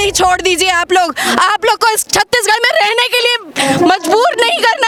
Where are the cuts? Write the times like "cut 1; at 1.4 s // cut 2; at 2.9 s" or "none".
none

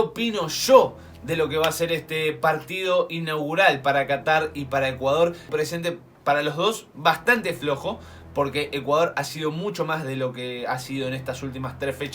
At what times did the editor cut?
cut 1; at 5.4 s

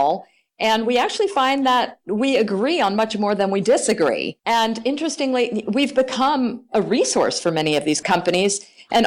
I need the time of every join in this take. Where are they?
cut 1; at 4.3 s // cut 2; at 8.0 s

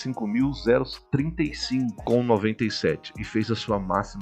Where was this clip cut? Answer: cut 1; at 2.0 s

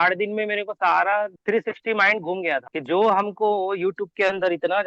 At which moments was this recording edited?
none

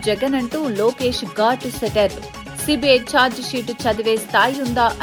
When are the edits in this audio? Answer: none

